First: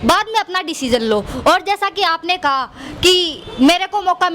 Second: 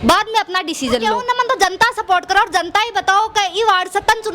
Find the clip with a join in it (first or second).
second